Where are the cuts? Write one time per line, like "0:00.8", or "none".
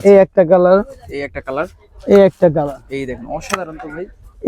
none